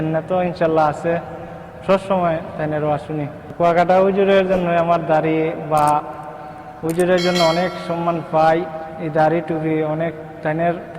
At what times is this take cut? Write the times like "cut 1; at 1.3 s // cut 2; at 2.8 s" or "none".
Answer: cut 1; at 3.4 s